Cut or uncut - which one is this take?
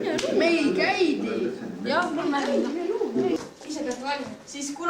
cut